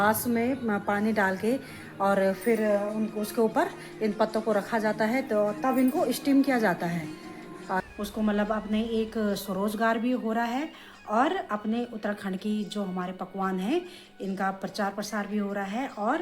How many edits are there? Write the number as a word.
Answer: one